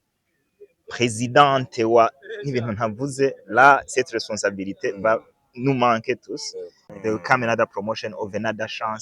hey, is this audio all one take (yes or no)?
no